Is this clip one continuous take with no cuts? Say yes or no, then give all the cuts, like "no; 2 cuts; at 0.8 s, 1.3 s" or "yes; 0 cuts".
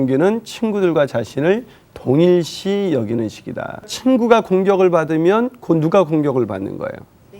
no; 1 cut; at 3.9 s